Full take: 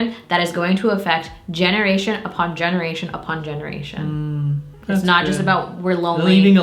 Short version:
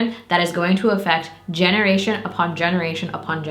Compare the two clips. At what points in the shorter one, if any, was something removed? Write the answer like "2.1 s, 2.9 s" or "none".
none

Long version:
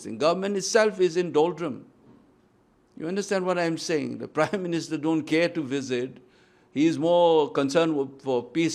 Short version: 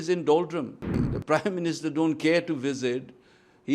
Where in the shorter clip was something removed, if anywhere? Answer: 1.0 s

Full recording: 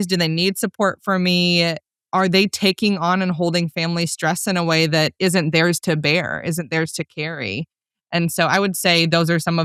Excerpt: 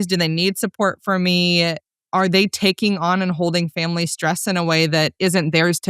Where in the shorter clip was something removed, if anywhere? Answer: none

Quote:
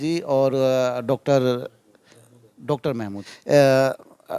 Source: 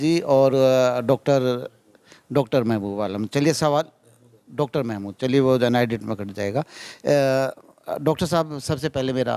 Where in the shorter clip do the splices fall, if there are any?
2.1 s, 3.2 s

